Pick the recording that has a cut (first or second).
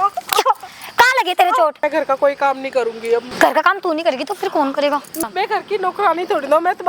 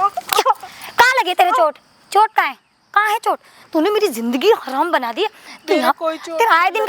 first